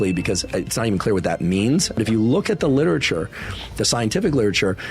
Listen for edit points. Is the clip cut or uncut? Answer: cut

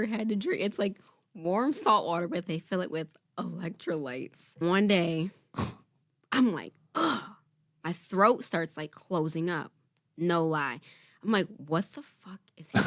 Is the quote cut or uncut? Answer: cut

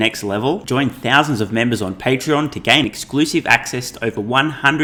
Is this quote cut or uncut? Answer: uncut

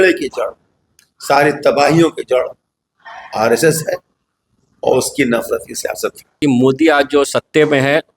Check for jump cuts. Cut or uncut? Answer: cut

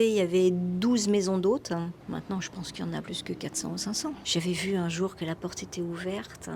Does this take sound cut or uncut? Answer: cut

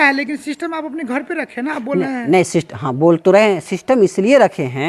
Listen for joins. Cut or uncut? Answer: uncut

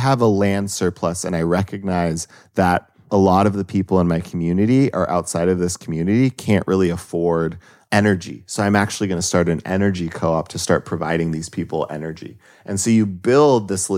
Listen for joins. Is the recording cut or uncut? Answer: cut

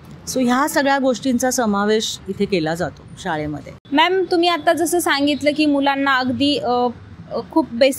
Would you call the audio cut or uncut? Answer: uncut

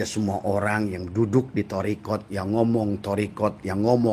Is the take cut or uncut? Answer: uncut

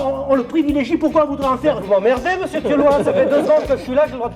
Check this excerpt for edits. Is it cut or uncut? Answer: uncut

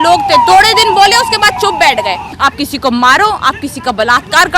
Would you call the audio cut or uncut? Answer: cut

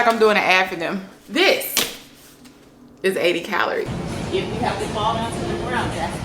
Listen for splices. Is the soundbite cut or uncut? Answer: cut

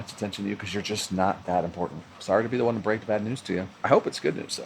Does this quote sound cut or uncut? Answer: cut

